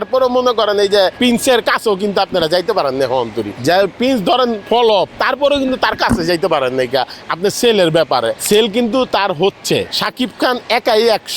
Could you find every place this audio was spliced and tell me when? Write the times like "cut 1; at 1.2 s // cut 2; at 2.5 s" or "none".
cut 1; at 1.2 s // cut 2; at 3.5 s // cut 3; at 4.8 s // cut 4; at 8.4 s // cut 5; at 9.9 s